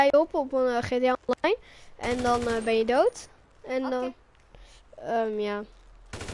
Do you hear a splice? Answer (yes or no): no